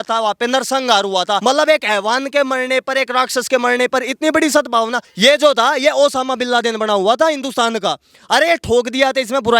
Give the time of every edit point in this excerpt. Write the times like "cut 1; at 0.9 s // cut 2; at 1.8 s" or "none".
cut 1; at 1.4 s // cut 2; at 5.0 s